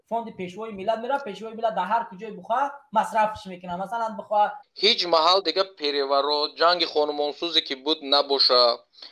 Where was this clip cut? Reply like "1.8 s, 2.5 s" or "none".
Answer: 4.6 s